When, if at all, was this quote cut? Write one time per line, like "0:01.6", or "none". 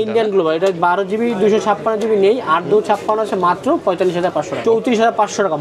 0:04.5